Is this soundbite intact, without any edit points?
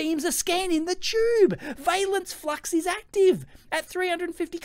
yes; 0 cuts

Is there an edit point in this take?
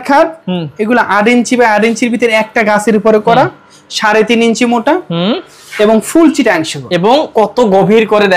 no; 0 cuts

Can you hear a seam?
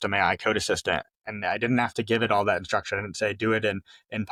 no; 0 cuts

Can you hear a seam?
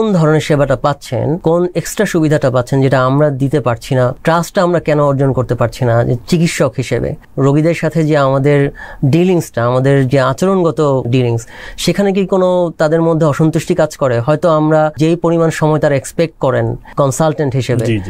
yes; 6 cuts; at 1.4 s, 4.2 s, 7.3 s, 11.1 s, 15.0 s, 16.9 s

